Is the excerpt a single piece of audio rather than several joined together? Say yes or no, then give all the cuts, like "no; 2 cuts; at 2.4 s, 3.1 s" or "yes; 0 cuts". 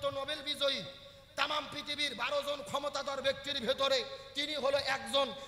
yes; 0 cuts